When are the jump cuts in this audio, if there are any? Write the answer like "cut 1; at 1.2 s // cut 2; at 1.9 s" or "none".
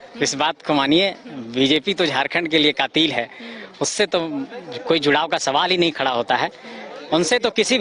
none